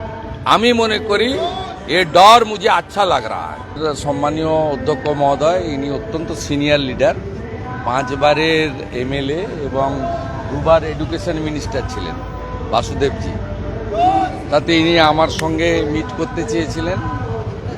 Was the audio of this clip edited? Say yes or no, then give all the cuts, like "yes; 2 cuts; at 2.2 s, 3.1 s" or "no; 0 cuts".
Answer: yes; 1 cut; at 3.7 s